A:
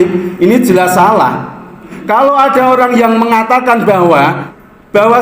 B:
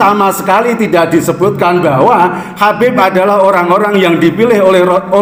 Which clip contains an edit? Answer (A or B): A